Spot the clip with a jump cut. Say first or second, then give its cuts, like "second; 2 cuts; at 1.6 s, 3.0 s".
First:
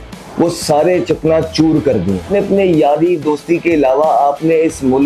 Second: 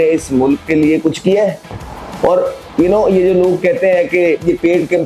first; 1 cut; at 2.3 s